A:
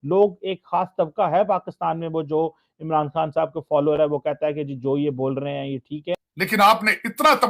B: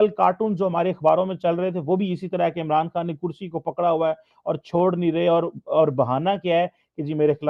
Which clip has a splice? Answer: A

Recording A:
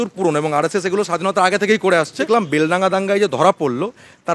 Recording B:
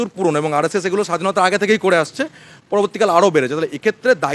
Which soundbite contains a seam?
A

